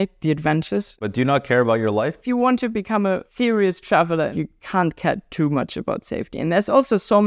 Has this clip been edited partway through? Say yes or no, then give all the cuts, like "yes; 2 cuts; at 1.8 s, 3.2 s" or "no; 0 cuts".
yes; 4 cuts; at 0.9 s, 2.2 s, 3.3 s, 4.3 s